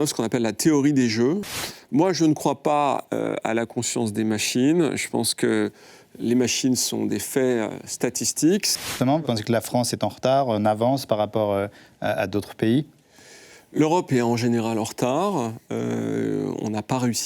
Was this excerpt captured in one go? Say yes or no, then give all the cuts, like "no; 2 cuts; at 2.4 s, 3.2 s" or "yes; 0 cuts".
no; 2 cuts; at 1.4 s, 8.8 s